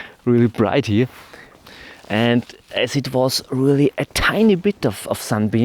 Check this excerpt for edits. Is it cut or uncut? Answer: cut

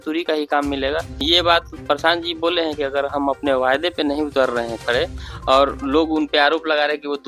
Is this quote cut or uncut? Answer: cut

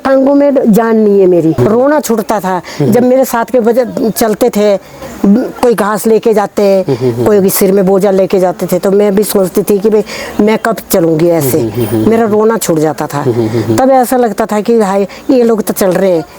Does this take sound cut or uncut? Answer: uncut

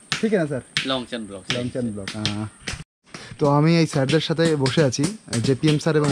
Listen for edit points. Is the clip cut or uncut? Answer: cut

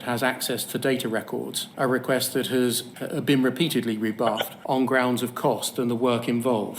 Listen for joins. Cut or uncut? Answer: cut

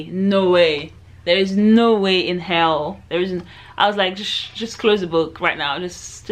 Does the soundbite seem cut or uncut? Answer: uncut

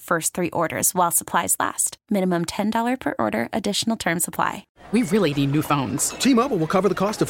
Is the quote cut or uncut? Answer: cut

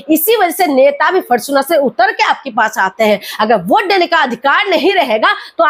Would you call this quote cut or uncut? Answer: uncut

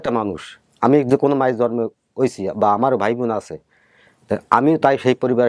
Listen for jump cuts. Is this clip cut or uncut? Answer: uncut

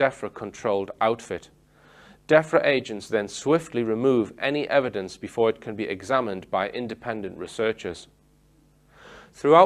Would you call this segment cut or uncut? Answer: uncut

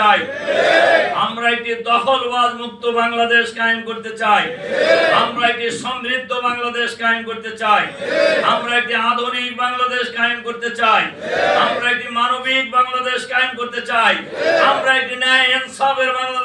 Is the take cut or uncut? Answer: uncut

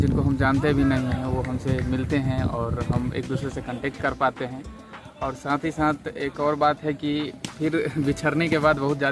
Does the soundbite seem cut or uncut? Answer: uncut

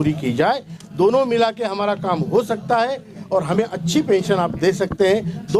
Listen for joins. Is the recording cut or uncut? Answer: uncut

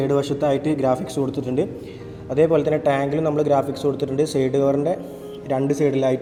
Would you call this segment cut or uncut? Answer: uncut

